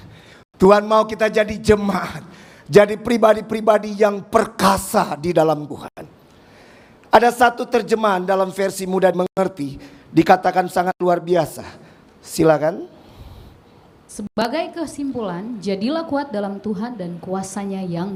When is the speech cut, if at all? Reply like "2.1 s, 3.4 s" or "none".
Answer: none